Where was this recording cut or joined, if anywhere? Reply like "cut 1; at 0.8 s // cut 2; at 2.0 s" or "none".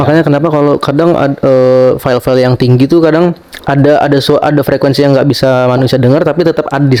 none